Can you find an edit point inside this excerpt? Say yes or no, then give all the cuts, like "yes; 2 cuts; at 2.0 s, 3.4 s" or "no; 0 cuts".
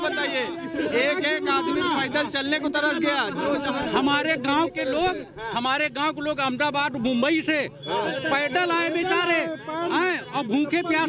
no; 0 cuts